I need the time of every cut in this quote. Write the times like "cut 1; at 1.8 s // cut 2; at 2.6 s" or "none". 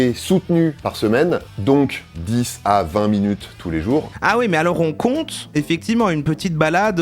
cut 1; at 4.1 s